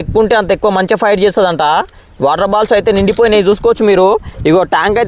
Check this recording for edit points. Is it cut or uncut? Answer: uncut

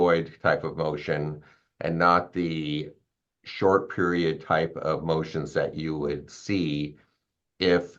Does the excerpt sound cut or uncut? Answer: uncut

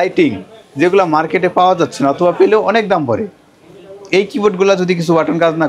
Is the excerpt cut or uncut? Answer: uncut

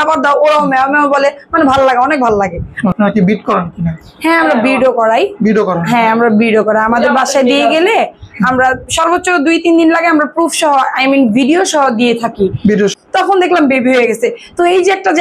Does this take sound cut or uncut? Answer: cut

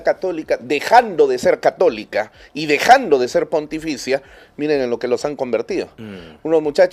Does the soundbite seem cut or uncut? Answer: uncut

